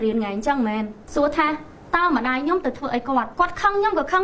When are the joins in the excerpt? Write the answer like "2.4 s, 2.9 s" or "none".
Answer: 1.0 s, 3.3 s